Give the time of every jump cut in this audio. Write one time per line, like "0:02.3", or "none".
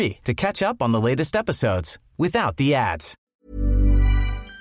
0:03.3